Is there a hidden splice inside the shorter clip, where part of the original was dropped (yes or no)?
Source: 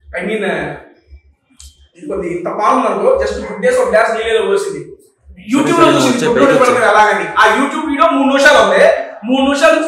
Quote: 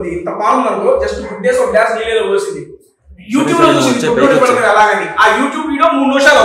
no